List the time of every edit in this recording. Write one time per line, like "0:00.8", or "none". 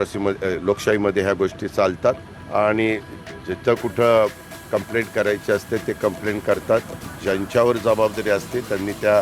0:02.3